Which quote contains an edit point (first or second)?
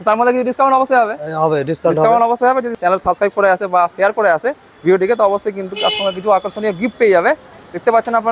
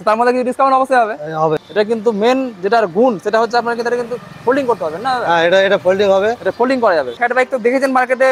second